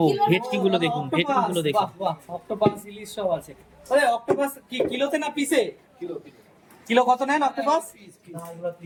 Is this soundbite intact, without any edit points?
yes; 0 cuts

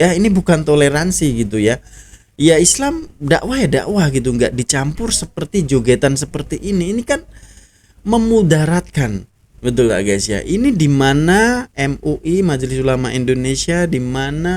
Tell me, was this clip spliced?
no; 0 cuts

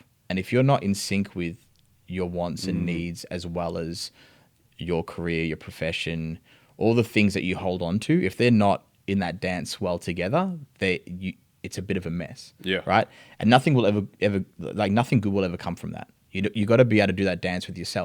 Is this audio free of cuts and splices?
yes; 0 cuts

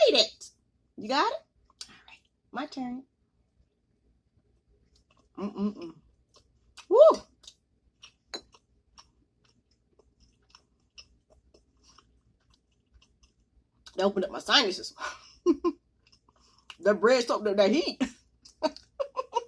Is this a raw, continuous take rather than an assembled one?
yes; 0 cuts

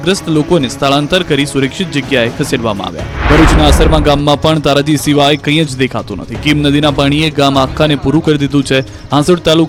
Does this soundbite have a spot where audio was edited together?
no; 0 cuts

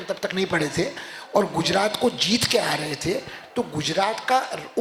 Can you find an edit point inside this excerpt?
no; 0 cuts

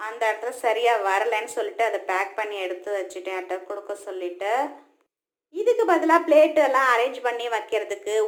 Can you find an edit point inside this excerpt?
no; 0 cuts

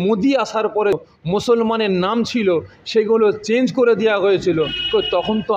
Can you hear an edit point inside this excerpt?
yes; 1 cut; at 1.0 s

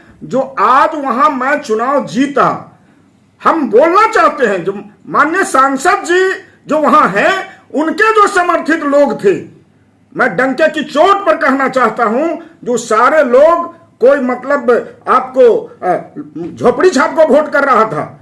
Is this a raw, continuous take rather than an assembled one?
yes; 0 cuts

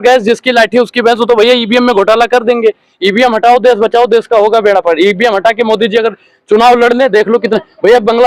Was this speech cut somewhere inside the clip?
no; 0 cuts

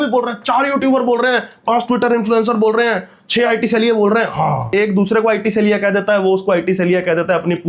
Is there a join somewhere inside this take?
yes; 1 cut; at 4.7 s

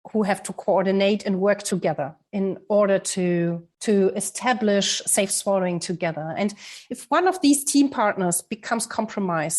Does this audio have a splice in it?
yes; 1 cut; at 3.7 s

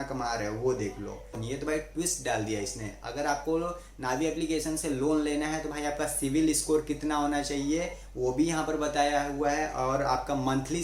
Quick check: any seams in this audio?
yes; 1 cut; at 1.4 s

